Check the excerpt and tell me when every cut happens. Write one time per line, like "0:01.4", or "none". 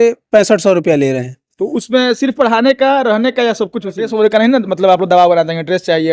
0:04.1